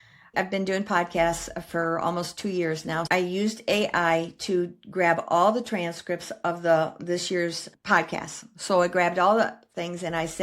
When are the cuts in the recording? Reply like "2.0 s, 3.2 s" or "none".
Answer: 3.0 s